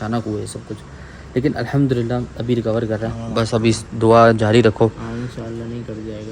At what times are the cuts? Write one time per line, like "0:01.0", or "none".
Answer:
none